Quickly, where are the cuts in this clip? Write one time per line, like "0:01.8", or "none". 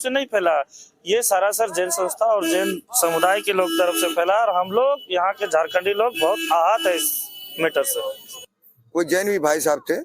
0:08.2